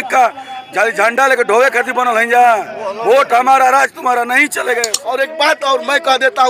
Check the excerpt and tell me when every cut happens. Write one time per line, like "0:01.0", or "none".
0:05.0